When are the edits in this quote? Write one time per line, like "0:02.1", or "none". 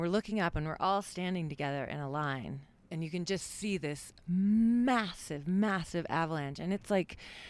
0:02.8